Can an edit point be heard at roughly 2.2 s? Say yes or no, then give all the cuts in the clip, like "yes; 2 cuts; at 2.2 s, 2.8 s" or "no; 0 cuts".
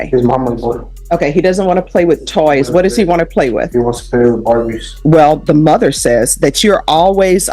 no; 2 cuts; at 0.9 s, 4.9 s